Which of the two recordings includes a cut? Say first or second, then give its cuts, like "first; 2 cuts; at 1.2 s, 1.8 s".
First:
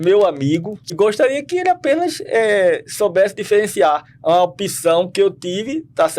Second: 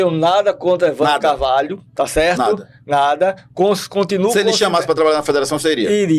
first; 1 cut; at 0.9 s